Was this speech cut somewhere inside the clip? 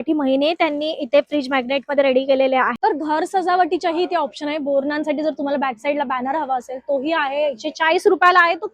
yes; 1 cut; at 2.9 s

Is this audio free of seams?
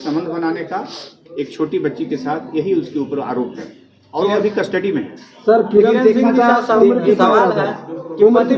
yes; 0 cuts

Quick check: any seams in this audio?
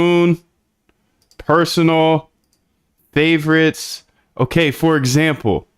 no; 0 cuts

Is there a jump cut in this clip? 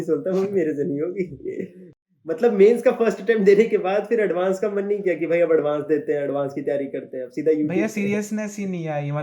yes; 1 cut; at 2.4 s

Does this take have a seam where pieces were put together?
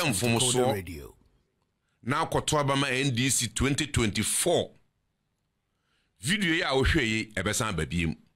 no; 0 cuts

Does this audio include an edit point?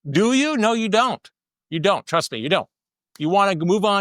no; 0 cuts

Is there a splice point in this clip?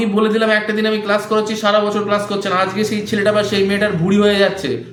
no; 0 cuts

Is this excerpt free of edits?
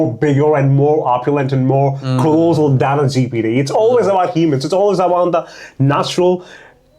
yes; 0 cuts

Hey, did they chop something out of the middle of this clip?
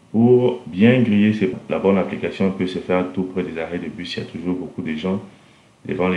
yes; 1 cut; at 1.5 s

